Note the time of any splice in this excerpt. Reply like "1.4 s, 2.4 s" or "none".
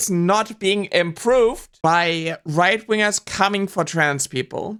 none